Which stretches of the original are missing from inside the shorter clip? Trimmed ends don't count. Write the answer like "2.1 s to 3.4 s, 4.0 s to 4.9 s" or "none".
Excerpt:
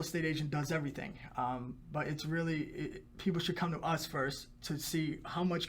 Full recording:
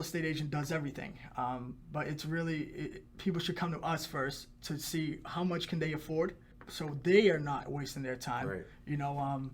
none